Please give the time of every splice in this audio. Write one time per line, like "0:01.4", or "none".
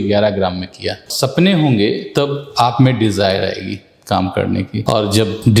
0:01.1